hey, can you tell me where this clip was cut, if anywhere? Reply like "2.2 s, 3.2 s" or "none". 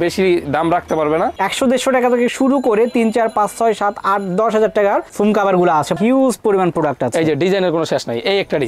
1.4 s, 6.0 s